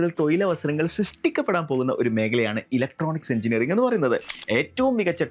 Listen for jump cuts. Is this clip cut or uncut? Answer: cut